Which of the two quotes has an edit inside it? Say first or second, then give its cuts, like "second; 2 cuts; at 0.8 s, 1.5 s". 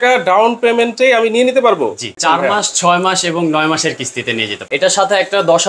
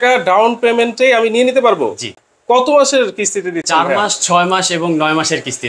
first; 2 cuts; at 2.1 s, 4.6 s